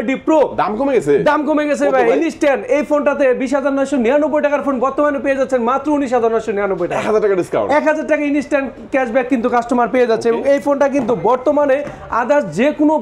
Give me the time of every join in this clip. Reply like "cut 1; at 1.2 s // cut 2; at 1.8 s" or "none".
none